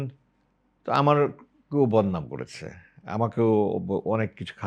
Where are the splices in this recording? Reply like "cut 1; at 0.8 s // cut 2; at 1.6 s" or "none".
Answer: none